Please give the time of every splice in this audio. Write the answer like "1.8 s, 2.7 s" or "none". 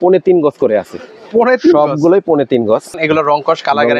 2.9 s